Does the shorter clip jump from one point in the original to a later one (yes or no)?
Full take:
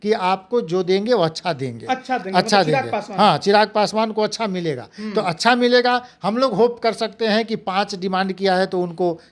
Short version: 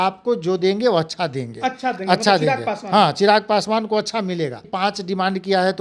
yes